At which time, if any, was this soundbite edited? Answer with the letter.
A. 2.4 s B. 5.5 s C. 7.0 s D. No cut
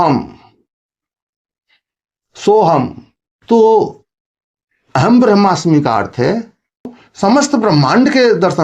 C